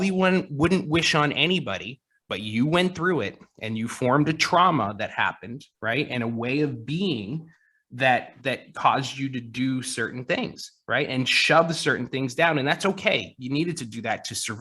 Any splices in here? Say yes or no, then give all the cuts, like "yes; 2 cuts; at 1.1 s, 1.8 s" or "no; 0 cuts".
no; 0 cuts